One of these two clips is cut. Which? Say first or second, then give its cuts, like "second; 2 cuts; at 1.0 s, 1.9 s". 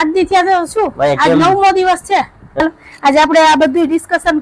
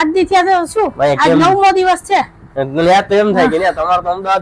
first; 1 cut; at 2.6 s